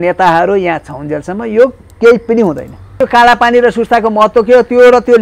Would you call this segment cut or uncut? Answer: cut